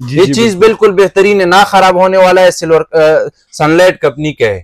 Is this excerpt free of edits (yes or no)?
yes